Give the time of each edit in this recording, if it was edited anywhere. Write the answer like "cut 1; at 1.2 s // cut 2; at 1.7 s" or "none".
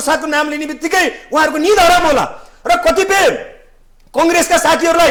none